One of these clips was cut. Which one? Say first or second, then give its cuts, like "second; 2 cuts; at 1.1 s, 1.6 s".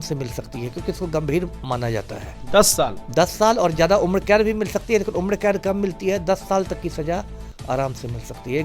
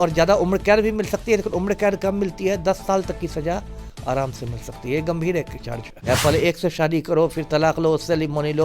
second; 1 cut; at 6.0 s